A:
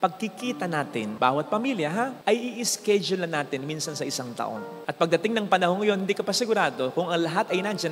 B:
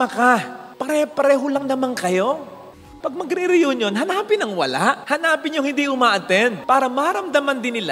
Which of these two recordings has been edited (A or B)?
B